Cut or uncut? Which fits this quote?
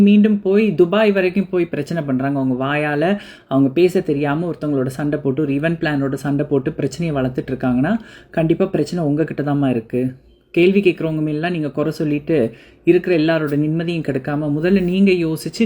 uncut